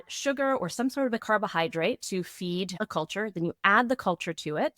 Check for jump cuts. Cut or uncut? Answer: cut